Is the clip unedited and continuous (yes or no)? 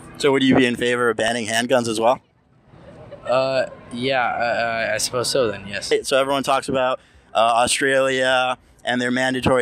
no